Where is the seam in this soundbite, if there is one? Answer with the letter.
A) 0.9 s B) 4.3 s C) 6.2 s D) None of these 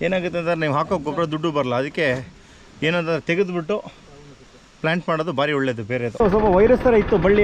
C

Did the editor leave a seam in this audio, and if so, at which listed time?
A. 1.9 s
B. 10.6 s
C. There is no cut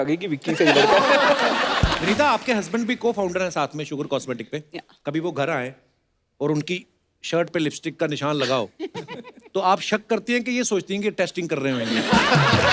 A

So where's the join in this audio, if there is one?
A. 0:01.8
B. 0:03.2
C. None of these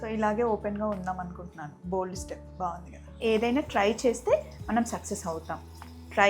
B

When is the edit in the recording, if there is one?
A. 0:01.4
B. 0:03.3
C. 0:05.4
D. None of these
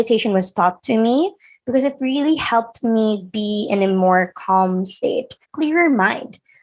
C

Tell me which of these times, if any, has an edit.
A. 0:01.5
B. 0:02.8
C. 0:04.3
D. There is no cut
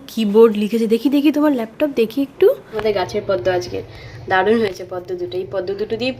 B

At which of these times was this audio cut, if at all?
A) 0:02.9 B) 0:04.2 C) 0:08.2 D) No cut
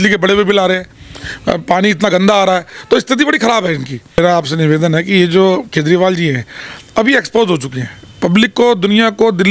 B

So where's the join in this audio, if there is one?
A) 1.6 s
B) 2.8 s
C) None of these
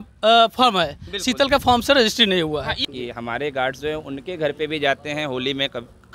B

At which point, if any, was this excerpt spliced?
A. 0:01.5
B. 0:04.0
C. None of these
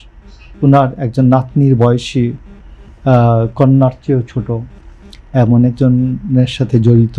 C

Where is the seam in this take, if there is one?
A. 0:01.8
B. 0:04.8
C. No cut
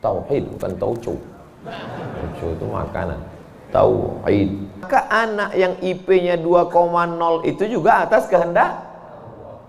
B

